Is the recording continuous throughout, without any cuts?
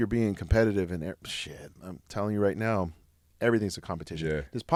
yes; 0 cuts

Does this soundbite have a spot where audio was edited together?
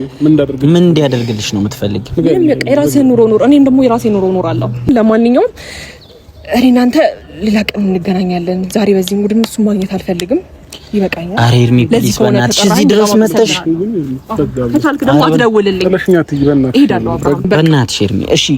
yes; 2 cuts; at 4.9 s, 17.4 s

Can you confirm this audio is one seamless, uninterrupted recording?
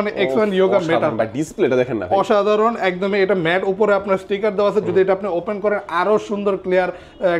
yes; 0 cuts

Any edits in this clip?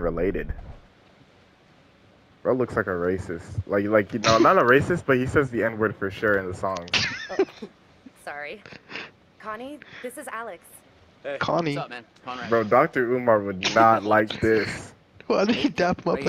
no; 0 cuts

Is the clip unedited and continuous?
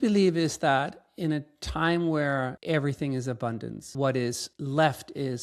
no; 3 cuts; at 2.6 s, 3.8 s, 4.5 s

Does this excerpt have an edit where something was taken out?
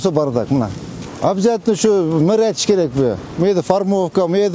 yes; 1 cut; at 1.1 s

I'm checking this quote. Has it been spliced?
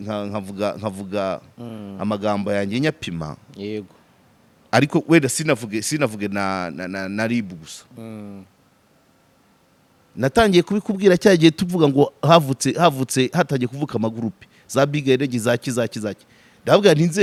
no; 0 cuts

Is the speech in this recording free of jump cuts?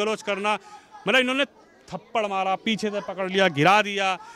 yes; 0 cuts

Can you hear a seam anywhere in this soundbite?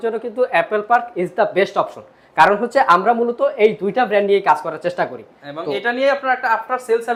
no; 0 cuts

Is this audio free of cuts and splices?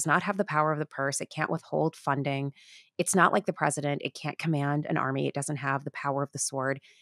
yes; 0 cuts

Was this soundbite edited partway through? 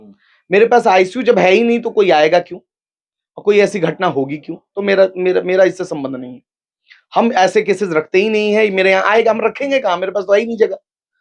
no; 0 cuts

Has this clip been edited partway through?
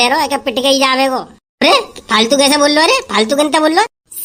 no; 0 cuts

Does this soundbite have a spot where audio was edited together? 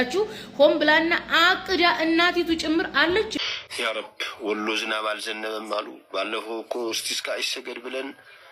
yes; 1 cut; at 3.3 s

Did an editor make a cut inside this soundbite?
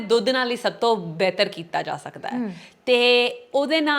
no; 0 cuts

